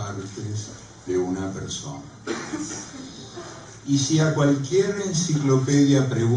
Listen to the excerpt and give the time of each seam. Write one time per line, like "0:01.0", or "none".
none